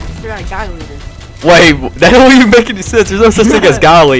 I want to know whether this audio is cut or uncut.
uncut